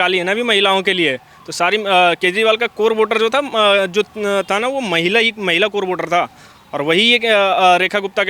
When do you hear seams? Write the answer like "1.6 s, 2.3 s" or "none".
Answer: none